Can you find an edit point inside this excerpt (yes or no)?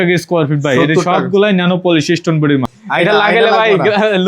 yes